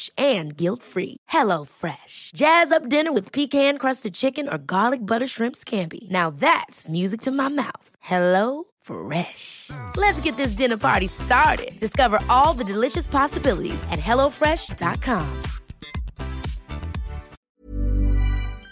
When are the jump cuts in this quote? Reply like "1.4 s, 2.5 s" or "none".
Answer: 17.4 s

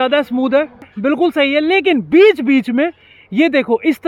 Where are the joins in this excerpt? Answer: 0.9 s

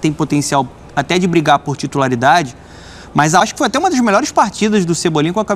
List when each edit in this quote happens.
3.4 s

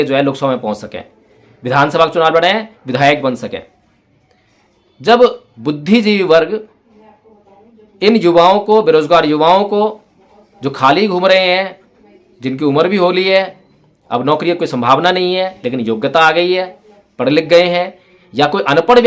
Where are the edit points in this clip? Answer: 5.5 s

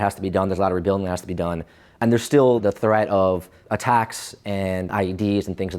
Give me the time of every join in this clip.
2.0 s, 2.6 s, 3.6 s, 4.9 s

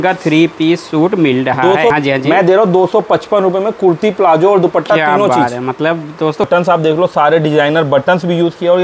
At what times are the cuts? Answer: 1.9 s, 6.5 s

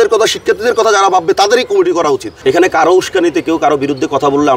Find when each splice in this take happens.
2.3 s

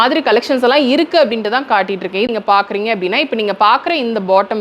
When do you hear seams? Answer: 2.3 s

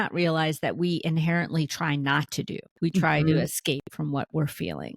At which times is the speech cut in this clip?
2.6 s

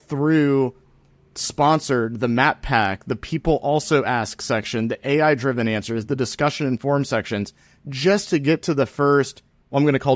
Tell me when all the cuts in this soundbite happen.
none

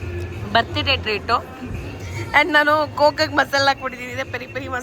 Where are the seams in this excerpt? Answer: none

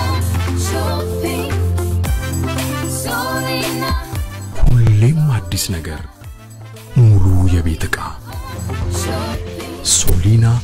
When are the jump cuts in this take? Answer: none

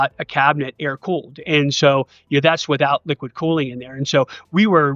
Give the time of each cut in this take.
none

